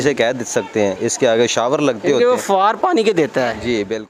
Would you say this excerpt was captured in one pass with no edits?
yes; 0 cuts

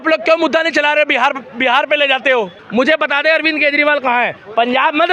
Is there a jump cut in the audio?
yes; 1 cut; at 2.6 s

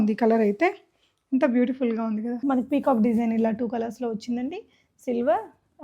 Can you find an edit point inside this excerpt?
yes; 1 cut; at 2.3 s

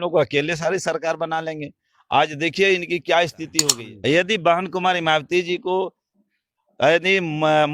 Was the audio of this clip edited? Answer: yes; 1 cut; at 3.5 s

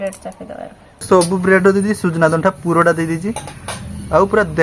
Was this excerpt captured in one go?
no; 1 cut; at 1.1 s

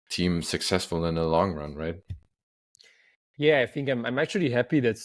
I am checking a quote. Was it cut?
no; 0 cuts

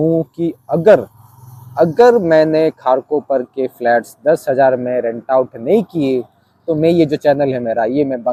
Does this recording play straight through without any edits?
yes; 0 cuts

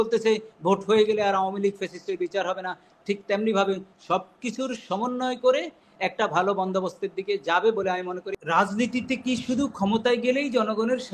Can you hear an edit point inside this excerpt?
yes; 1 cut; at 8.3 s

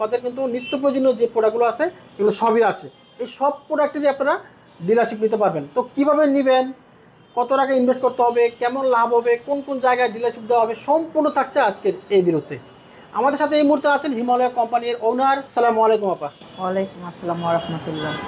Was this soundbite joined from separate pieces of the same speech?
no; 0 cuts

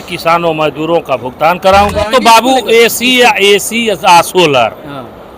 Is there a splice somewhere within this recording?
yes; 1 cut; at 1.9 s

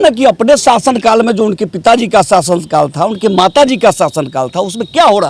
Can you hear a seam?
no; 0 cuts

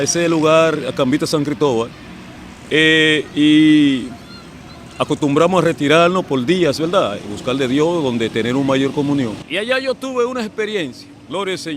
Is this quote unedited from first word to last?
no; 1 cut; at 9.4 s

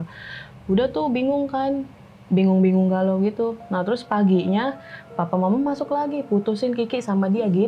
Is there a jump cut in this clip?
no; 0 cuts

